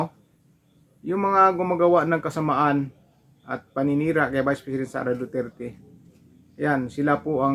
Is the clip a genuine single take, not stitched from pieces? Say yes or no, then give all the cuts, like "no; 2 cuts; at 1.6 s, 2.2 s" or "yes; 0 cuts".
yes; 0 cuts